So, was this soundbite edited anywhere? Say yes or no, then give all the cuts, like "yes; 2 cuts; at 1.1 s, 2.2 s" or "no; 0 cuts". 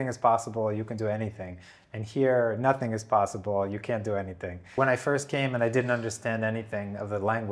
yes; 1 cut; at 4.7 s